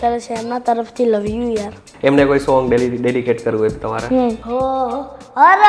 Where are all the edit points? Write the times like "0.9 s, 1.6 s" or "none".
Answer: 1.9 s, 4.4 s